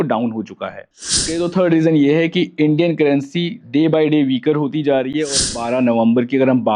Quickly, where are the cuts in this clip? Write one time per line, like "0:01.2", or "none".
0:01.2
0:05.5

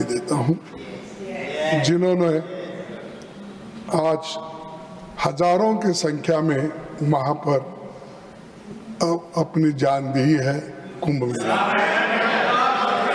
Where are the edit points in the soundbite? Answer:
none

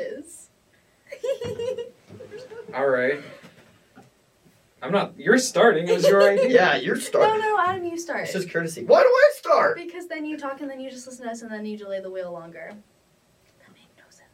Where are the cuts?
none

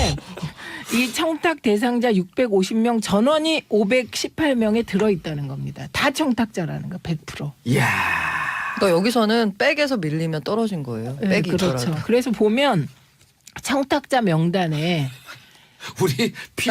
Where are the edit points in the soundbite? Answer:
0:12.8

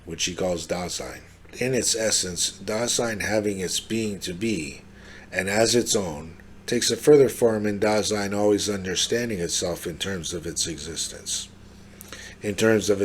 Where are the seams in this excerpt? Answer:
0:01.5

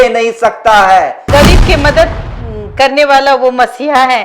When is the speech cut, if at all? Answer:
0:01.3

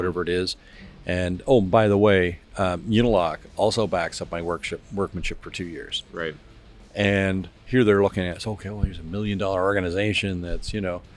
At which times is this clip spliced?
0:07.6

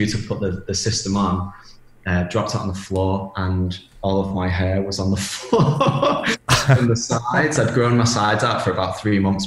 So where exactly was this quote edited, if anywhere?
none

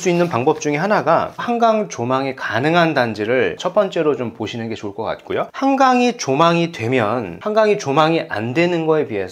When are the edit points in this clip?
0:01.4
0:05.5

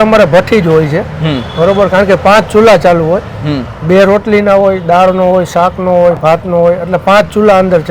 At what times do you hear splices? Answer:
none

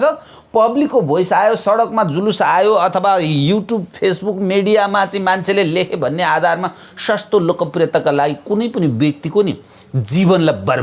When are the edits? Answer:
none

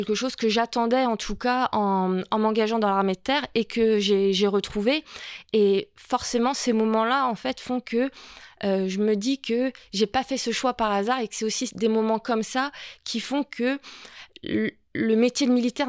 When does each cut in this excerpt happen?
none

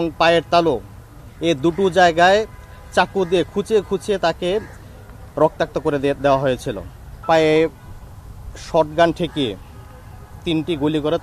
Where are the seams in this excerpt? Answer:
0:07.2

